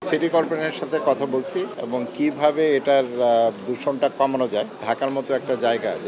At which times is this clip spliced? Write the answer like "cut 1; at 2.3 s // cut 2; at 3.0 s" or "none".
cut 1; at 1.8 s // cut 2; at 4.8 s